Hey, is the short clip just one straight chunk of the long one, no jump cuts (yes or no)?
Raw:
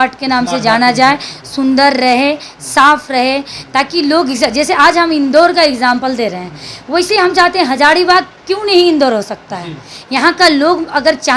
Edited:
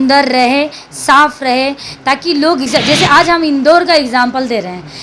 yes